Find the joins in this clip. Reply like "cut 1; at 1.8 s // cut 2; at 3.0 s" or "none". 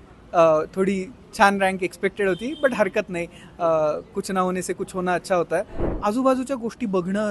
cut 1; at 5.8 s